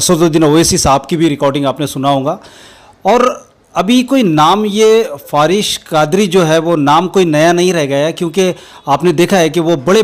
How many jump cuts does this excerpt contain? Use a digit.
0